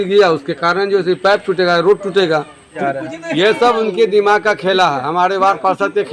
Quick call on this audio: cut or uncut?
cut